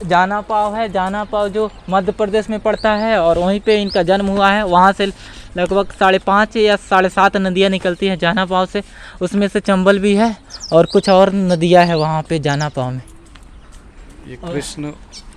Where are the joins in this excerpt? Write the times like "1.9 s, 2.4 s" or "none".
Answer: none

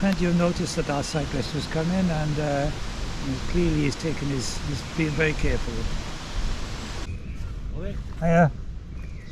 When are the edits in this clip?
7.0 s

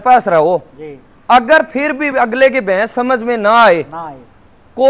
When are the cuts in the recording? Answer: none

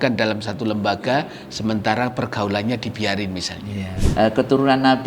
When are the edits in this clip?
4.1 s

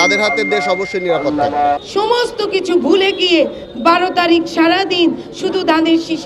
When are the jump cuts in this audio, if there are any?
1.8 s

